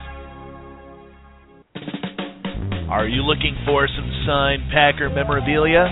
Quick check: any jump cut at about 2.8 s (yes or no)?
no